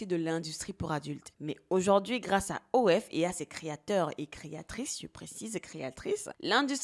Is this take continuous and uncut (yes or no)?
yes